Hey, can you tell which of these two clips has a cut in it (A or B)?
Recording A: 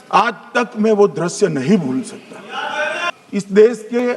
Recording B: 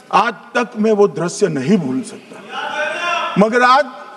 A